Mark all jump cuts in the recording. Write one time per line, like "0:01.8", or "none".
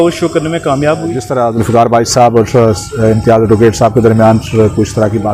0:01.3